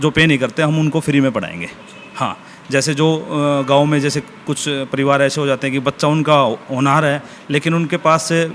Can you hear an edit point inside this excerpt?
no; 0 cuts

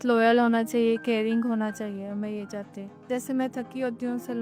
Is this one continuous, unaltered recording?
no; 1 cut; at 3.1 s

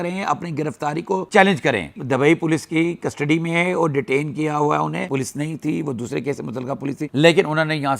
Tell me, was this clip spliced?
yes; 2 cuts; at 2.0 s, 5.0 s

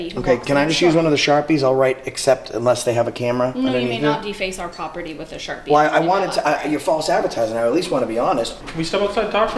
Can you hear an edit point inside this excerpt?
yes; 1 cut; at 8.5 s

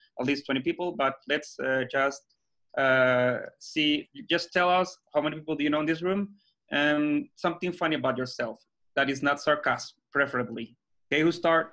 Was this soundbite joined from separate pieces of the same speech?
no; 0 cuts

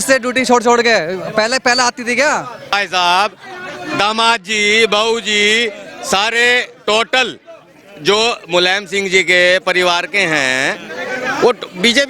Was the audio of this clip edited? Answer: yes; 1 cut; at 2.8 s

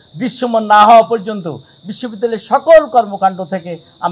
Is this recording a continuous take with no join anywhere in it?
yes; 0 cuts

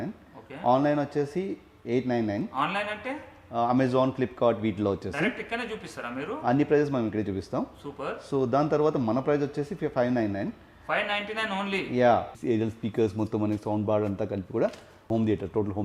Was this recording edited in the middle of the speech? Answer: yes; 2 cuts; at 12.4 s, 14.9 s

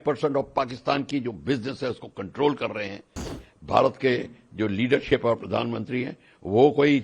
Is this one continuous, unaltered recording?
no; 1 cut; at 3.4 s

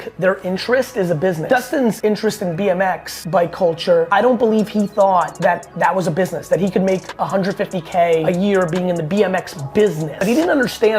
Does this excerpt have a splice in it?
yes; 6 cuts; at 1.7 s, 3.1 s, 4.1 s, 5.3 s, 8.2 s, 10.1 s

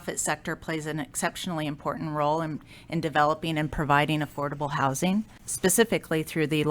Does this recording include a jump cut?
no; 0 cuts

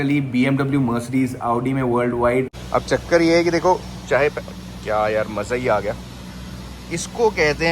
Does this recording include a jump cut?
yes; 1 cut; at 2.6 s

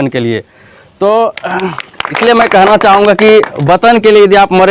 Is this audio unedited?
no; 1 cut; at 2.1 s

